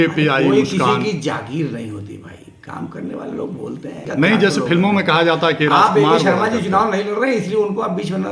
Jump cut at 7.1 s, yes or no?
no